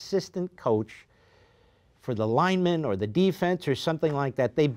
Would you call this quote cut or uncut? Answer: uncut